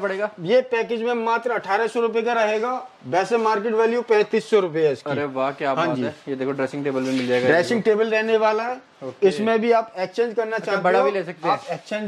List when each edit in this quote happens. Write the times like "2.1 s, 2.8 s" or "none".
none